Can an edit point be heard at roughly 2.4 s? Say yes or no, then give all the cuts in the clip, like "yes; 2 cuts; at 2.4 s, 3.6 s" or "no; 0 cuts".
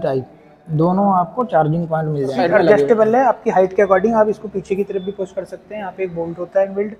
yes; 1 cut; at 2.4 s